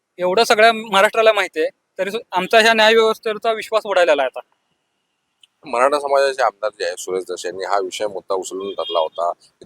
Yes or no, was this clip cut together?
no